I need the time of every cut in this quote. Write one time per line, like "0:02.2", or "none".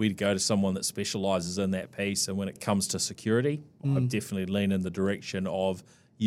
0:02.6
0:03.7